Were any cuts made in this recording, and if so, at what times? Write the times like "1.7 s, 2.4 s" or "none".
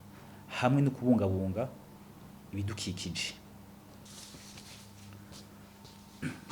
4.0 s